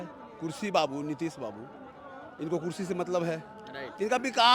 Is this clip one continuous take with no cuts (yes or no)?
yes